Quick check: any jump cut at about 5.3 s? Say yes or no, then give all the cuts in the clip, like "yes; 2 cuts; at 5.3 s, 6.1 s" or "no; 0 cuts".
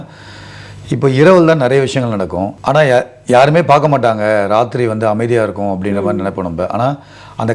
no; 1 cut; at 2.5 s